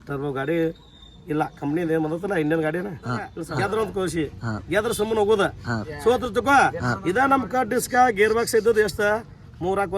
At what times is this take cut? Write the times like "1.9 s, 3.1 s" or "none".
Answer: 3.4 s